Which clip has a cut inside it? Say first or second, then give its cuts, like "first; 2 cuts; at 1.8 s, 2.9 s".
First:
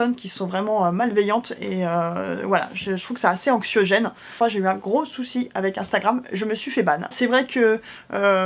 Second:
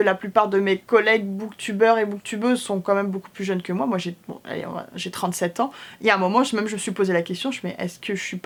first; 2 cuts; at 4.3 s, 7.1 s